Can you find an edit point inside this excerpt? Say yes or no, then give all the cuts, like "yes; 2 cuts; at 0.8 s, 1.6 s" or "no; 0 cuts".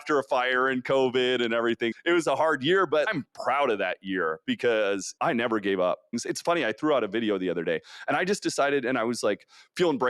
yes; 2 cuts; at 5.1 s, 6.1 s